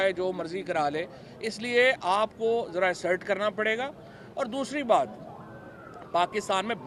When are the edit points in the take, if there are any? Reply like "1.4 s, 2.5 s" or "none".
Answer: none

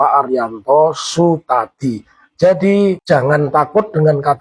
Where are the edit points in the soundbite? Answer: 3.0 s

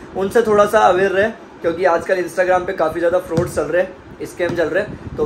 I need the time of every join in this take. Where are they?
none

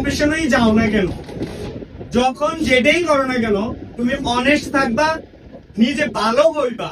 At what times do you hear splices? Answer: none

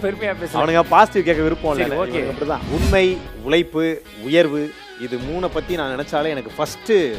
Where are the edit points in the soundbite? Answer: 2.6 s

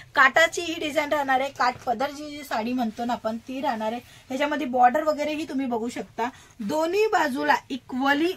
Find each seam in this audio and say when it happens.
none

